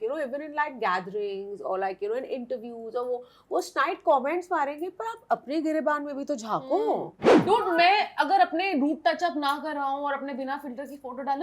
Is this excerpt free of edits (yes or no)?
no